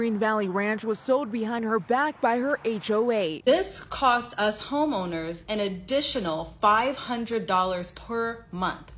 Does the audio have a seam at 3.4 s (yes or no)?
yes